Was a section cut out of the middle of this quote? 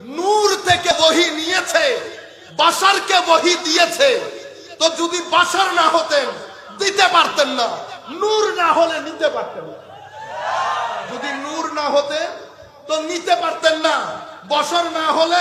yes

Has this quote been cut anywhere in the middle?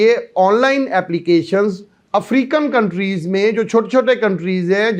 no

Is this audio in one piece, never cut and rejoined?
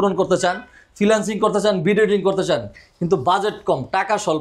yes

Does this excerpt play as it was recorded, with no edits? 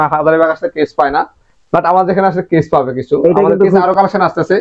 yes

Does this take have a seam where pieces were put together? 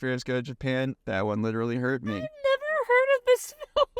yes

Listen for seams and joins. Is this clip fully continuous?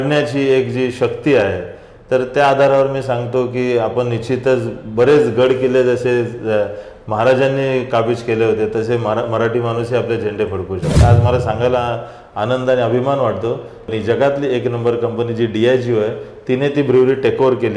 no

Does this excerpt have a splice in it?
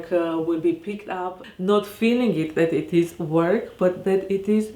yes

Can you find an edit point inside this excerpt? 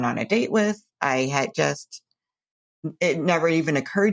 no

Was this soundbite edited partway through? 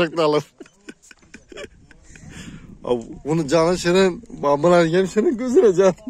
no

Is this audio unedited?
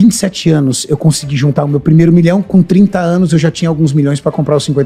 yes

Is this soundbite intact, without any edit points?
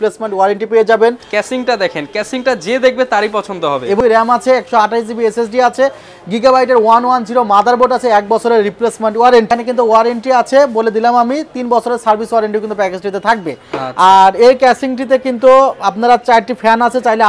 no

